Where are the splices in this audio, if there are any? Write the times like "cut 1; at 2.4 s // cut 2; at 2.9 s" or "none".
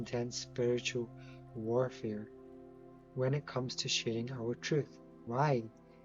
none